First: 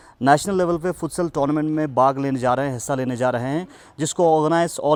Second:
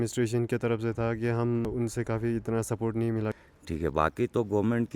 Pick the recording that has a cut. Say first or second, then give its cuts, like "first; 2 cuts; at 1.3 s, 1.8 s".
second; 2 cuts; at 1.7 s, 3.4 s